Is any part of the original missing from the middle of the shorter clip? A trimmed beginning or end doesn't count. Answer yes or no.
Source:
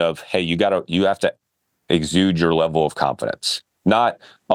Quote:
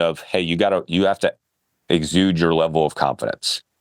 no